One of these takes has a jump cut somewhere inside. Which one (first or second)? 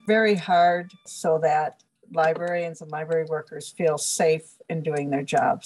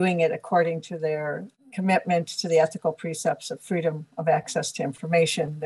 first